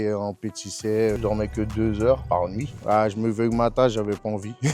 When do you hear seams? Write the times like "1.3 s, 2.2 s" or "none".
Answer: 1.2 s, 2.2 s